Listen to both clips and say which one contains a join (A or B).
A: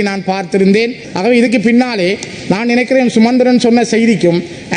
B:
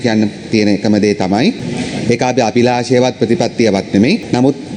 A